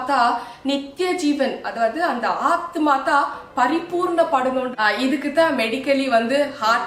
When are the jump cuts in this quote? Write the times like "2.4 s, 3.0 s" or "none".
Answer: 4.7 s